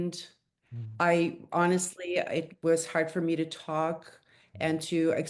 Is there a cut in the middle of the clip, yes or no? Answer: no